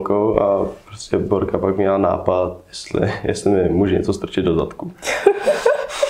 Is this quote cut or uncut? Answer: uncut